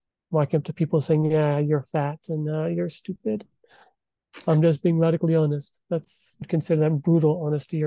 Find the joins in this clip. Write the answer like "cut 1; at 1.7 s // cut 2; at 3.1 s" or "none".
cut 1; at 6.4 s